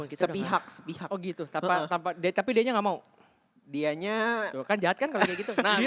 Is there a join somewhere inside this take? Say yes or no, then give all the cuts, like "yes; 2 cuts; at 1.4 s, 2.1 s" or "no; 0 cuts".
no; 0 cuts